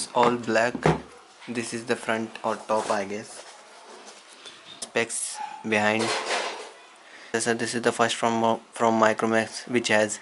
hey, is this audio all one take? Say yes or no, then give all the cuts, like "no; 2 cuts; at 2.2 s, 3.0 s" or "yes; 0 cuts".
yes; 0 cuts